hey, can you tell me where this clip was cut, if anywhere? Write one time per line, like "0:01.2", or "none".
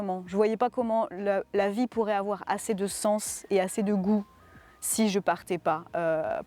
none